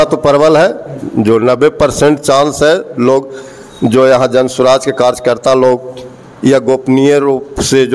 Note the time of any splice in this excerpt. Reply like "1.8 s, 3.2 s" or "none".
none